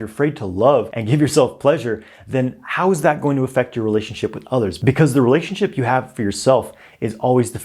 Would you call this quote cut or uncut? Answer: cut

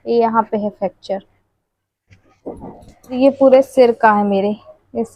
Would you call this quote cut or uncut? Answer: cut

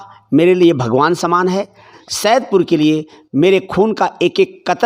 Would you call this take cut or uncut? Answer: cut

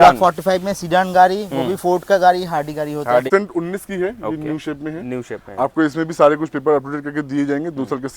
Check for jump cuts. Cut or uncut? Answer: cut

